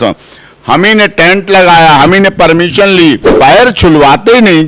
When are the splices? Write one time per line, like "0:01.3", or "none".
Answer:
0:03.3